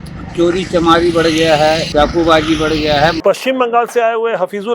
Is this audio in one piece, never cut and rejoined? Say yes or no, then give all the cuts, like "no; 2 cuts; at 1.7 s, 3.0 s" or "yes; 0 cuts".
no; 2 cuts; at 1.9 s, 3.2 s